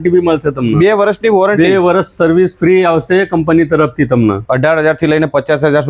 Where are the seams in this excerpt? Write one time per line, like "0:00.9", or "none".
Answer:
0:04.4